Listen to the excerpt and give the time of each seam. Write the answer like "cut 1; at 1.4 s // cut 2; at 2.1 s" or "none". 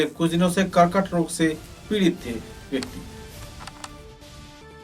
none